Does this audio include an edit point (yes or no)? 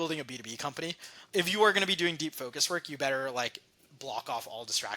yes